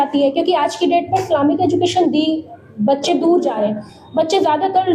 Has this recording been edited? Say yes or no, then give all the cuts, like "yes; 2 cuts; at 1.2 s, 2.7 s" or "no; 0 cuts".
no; 0 cuts